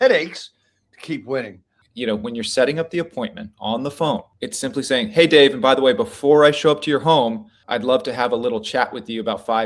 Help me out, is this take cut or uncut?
cut